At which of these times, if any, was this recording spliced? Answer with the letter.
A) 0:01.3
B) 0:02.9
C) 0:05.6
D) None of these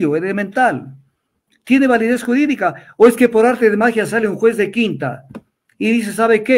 D